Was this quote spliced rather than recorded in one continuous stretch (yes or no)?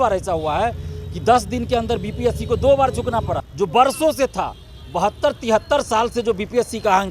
yes